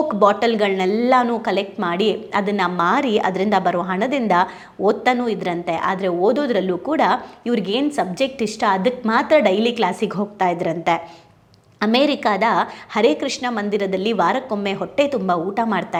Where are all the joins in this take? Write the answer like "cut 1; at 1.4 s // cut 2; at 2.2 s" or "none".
none